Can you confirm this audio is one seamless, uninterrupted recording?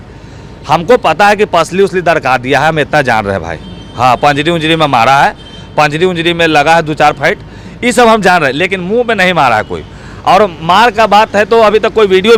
yes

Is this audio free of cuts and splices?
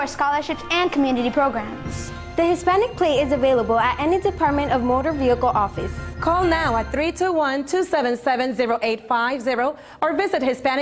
yes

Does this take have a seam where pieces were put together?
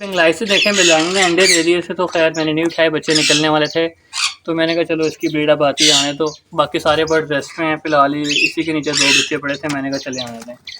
no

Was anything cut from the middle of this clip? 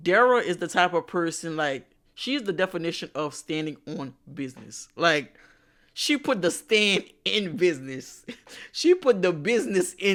no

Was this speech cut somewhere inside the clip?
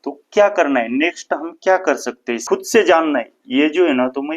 yes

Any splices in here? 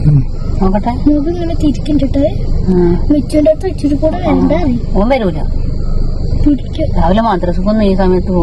no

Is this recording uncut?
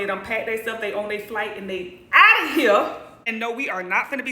no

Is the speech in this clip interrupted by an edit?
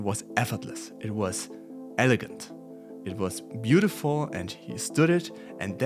no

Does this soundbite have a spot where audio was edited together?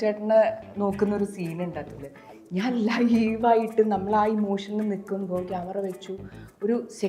no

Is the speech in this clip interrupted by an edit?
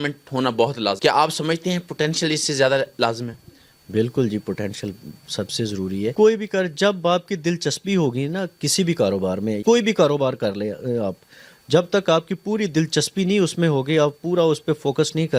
no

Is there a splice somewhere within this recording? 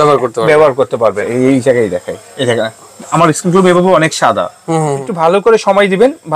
yes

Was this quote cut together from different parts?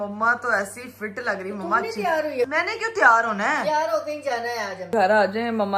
yes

